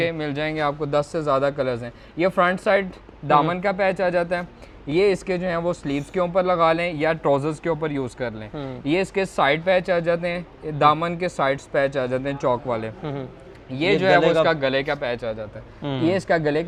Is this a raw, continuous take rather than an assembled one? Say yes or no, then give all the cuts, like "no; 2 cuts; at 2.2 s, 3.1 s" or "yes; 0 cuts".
yes; 0 cuts